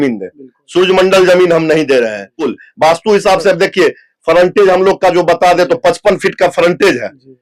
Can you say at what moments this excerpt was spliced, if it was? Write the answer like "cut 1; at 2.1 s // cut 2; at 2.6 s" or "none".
cut 1; at 2.5 s

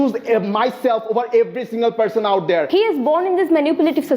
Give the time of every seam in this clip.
cut 1; at 2.7 s

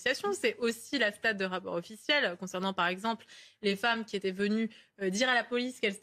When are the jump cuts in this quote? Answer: none

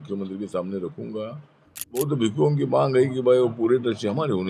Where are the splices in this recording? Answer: cut 1; at 2.0 s

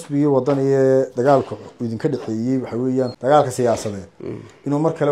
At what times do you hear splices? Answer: cut 1; at 3.1 s

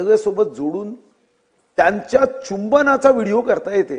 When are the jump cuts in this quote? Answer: none

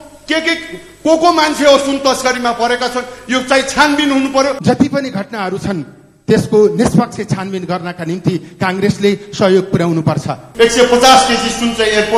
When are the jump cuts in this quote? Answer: cut 1; at 4.6 s // cut 2; at 10.4 s

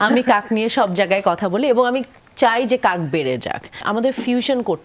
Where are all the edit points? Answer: cut 1; at 3.8 s

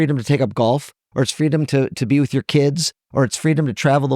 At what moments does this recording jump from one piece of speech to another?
none

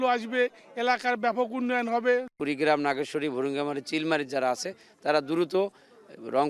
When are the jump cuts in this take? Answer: cut 1; at 2.3 s

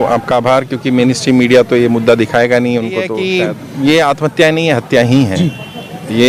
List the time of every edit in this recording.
cut 1; at 3.2 s

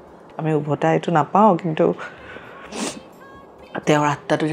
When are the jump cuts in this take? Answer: none

